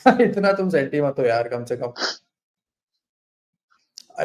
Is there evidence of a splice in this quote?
no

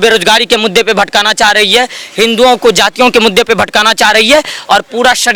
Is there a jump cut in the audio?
no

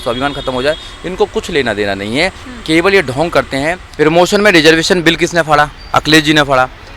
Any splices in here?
yes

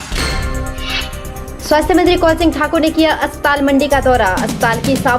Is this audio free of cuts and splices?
no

